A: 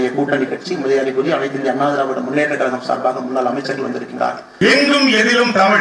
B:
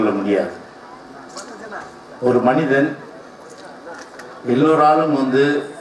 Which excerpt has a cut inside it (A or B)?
A